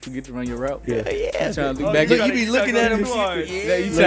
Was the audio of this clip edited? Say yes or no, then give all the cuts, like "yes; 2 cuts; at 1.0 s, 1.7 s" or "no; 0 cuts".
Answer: no; 0 cuts